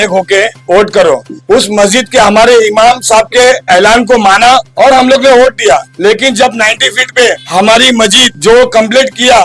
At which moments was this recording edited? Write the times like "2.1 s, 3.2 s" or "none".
1.3 s, 4.7 s, 5.9 s, 7.4 s, 8.3 s